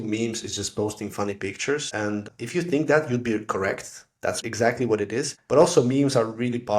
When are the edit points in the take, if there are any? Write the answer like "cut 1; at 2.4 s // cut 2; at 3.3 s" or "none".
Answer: cut 1; at 2.1 s // cut 2; at 4.4 s // cut 3; at 5.4 s